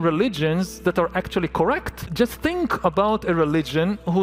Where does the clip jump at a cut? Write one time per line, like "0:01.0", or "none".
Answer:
0:02.0